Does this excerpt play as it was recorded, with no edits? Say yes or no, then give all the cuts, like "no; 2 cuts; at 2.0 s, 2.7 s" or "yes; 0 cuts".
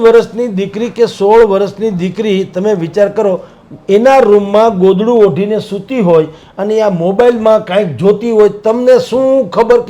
yes; 0 cuts